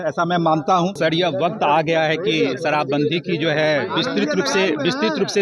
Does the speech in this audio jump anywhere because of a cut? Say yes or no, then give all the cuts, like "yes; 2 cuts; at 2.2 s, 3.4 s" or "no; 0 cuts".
yes; 1 cut; at 1.0 s